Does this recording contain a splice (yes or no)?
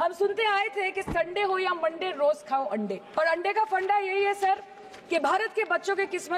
yes